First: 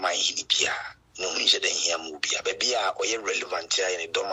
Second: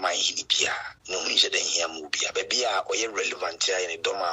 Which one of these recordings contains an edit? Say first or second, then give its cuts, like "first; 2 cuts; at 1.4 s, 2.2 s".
second; 1 cut; at 0.9 s